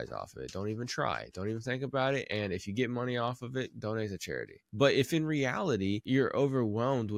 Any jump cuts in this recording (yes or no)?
yes